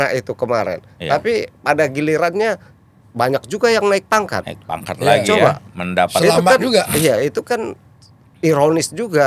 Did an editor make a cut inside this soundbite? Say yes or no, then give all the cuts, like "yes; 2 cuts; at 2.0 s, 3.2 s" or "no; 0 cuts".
no; 0 cuts